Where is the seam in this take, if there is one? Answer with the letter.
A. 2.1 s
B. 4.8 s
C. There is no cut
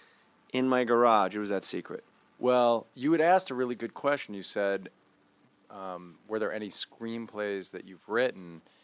C